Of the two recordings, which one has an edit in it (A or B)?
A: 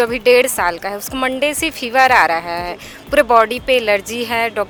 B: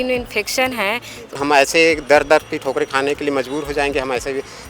B